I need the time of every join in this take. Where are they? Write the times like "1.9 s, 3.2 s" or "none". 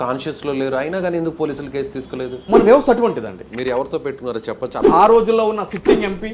3.4 s, 4.8 s